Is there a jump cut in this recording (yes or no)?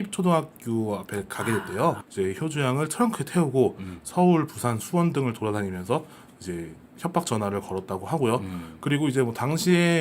yes